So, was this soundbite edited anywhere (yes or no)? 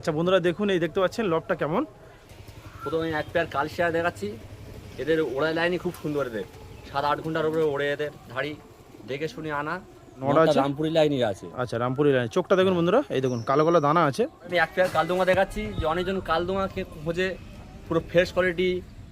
yes